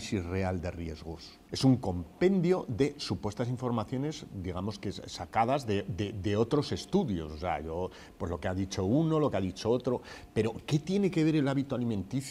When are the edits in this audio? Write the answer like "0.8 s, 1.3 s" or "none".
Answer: none